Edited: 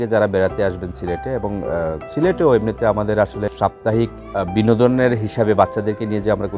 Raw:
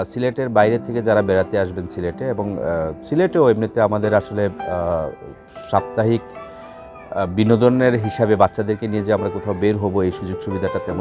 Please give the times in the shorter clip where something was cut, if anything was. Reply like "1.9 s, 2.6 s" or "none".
3.5 s, 4.2 s